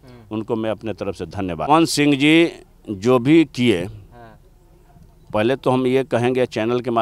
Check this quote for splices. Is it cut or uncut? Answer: uncut